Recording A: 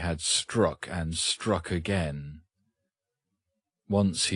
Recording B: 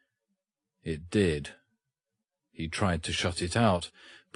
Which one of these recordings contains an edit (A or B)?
B